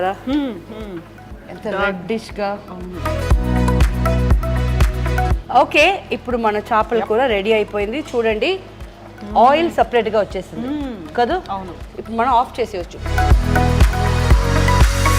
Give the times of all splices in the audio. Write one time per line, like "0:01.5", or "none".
0:13.0